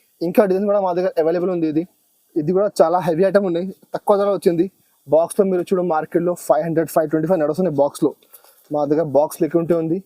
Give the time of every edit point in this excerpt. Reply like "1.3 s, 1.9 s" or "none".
none